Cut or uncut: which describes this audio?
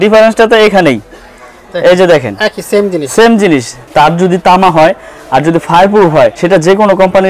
cut